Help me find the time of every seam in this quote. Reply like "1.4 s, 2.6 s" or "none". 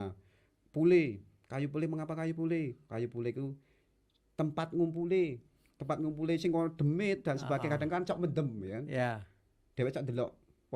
none